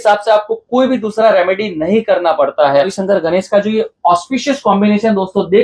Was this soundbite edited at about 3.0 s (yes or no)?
yes